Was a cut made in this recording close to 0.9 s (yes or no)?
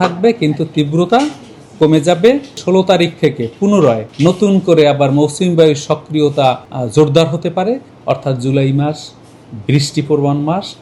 no